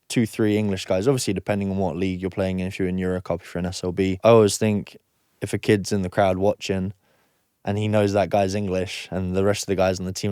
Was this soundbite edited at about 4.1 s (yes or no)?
yes